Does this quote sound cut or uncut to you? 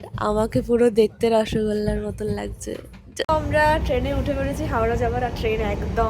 cut